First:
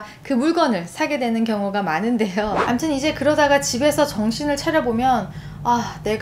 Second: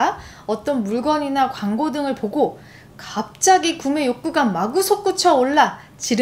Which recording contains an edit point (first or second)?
first